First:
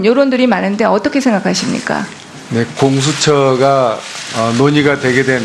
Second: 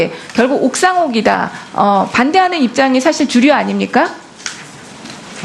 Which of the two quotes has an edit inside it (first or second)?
second